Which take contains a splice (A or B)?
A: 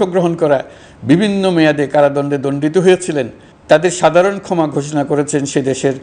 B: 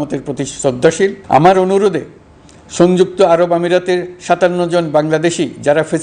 B